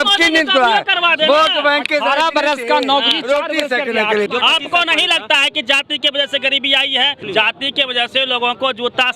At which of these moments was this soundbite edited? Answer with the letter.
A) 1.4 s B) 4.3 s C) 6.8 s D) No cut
B